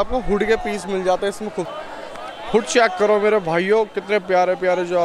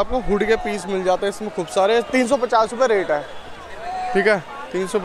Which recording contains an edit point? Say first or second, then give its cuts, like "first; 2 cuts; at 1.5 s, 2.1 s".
first; 1 cut; at 1.7 s